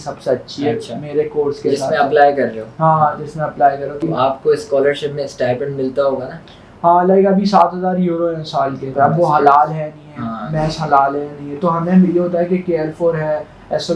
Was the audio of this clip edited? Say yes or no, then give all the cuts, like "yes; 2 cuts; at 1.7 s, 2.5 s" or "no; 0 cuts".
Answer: yes; 2 cuts; at 4.0 s, 8.9 s